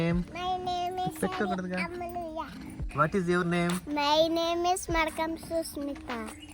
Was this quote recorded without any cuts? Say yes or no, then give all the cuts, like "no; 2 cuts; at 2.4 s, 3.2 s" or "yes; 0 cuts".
no; 1 cut; at 2.9 s